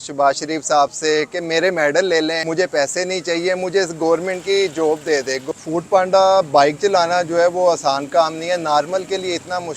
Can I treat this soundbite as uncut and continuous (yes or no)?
no